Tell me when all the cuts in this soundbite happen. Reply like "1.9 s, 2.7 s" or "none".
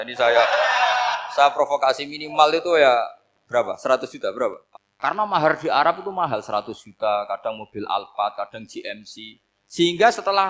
4.6 s